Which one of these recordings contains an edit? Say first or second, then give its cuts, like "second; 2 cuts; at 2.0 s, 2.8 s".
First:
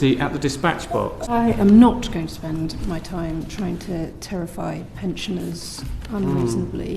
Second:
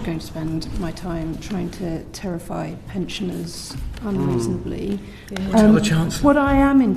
first; 1 cut; at 1.2 s